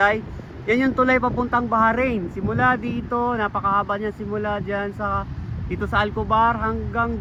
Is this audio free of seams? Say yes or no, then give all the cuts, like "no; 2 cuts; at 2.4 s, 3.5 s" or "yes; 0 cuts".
yes; 0 cuts